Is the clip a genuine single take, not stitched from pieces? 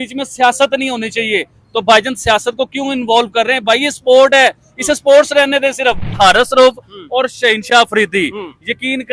no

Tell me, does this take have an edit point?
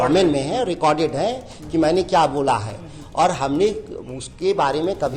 no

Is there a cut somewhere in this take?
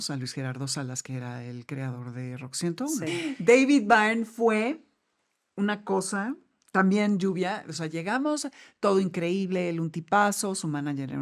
yes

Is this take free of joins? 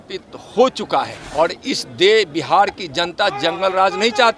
no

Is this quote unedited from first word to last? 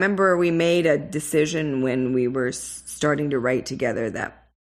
yes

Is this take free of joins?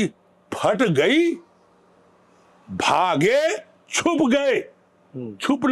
yes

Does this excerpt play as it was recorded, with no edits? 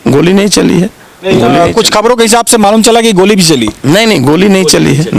yes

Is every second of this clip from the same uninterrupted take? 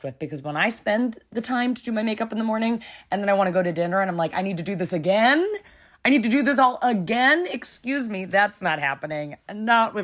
yes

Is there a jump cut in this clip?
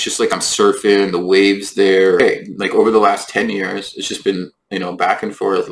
yes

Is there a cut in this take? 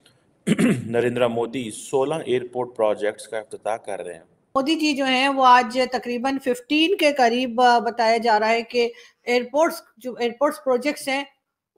yes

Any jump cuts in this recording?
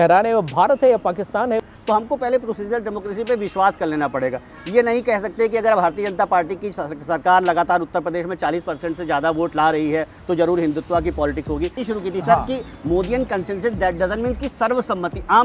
yes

